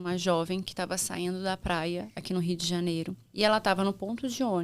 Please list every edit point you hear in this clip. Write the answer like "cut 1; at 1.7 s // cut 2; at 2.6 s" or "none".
cut 1; at 3.2 s